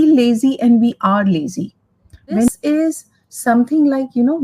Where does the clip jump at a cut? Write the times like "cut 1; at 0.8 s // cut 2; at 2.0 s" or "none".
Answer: cut 1; at 2.5 s